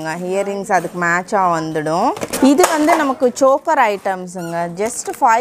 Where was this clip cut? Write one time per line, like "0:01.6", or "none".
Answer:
0:02.3